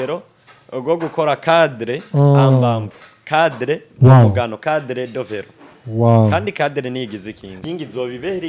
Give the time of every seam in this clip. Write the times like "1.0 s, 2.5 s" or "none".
7.5 s